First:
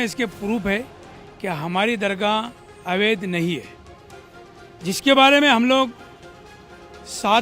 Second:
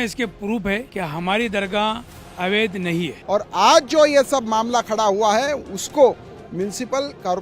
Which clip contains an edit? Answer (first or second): second